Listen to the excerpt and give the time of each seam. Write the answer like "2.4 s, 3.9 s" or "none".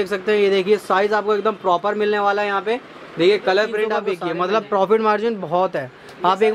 4.0 s